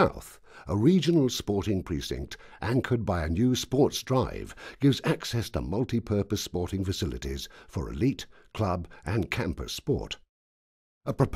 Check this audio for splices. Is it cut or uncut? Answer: cut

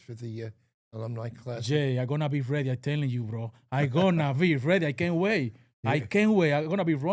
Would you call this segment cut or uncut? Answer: uncut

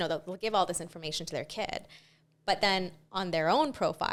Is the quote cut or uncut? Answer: uncut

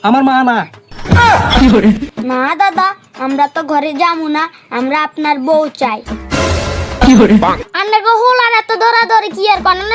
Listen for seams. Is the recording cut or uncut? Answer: cut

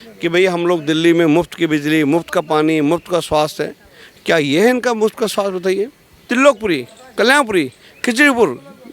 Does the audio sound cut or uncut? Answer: cut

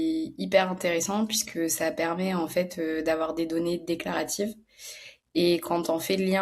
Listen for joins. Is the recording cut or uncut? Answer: uncut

